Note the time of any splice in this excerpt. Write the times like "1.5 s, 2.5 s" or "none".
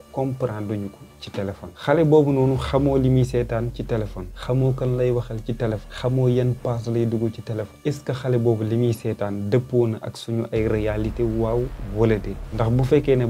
5.9 s, 7.7 s